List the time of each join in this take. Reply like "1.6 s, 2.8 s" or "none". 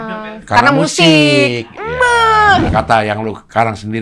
2.7 s